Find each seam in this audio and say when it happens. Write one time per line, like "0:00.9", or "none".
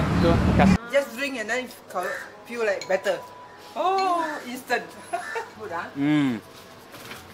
0:00.9
0:05.5